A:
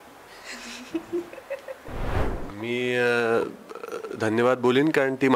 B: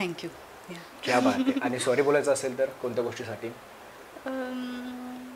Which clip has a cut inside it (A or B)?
A